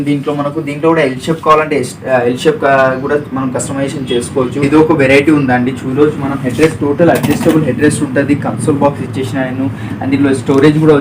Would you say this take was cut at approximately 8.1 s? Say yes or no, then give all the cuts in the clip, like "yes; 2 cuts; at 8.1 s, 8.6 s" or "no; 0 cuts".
no; 1 cut; at 4.6 s